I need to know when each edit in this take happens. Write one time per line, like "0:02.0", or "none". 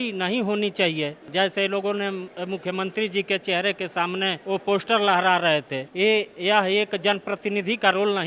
0:01.2
0:04.4
0:05.8